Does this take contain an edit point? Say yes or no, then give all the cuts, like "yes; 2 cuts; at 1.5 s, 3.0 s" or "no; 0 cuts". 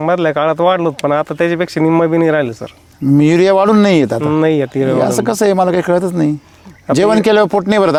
no; 0 cuts